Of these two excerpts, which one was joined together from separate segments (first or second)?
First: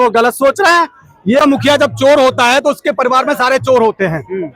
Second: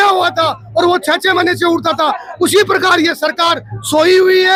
first